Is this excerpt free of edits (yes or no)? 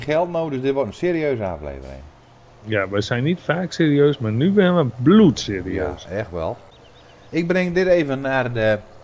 yes